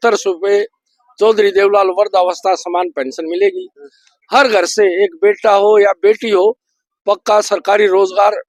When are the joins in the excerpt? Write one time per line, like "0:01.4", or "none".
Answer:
none